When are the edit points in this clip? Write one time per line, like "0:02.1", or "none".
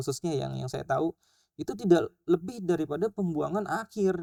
none